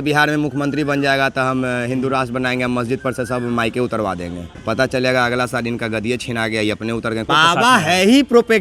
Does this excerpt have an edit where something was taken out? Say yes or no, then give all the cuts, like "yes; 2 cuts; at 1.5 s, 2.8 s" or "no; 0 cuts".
yes; 2 cuts; at 4.5 s, 7.3 s